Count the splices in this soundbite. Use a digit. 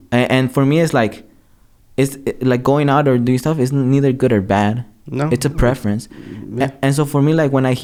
0